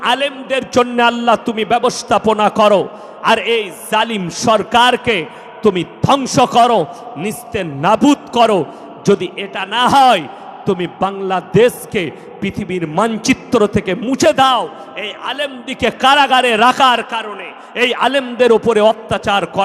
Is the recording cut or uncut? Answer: uncut